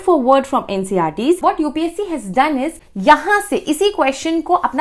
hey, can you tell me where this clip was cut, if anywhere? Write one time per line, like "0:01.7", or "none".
0:01.4
0:02.9